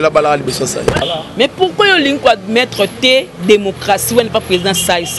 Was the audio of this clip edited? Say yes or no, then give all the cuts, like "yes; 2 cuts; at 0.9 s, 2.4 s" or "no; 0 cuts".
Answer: yes; 1 cut; at 1.0 s